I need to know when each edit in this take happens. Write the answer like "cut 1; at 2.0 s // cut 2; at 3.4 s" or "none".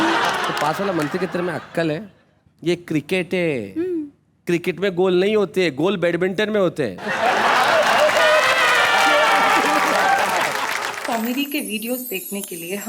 cut 1; at 10.9 s